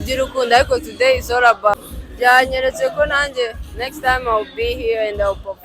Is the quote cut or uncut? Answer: cut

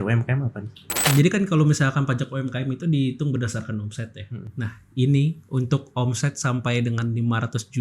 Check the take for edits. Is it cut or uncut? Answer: cut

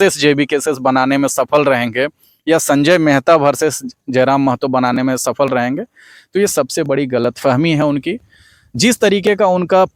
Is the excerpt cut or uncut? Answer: uncut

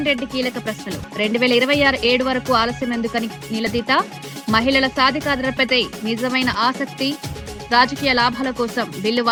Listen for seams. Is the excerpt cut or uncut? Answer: uncut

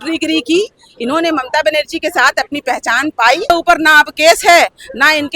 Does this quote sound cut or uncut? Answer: cut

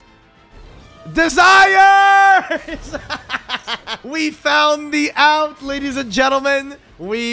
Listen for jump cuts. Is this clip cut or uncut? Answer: uncut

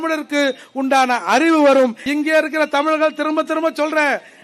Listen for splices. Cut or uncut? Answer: cut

